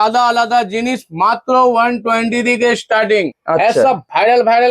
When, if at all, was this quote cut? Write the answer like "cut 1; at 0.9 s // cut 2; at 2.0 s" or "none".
cut 1; at 3.4 s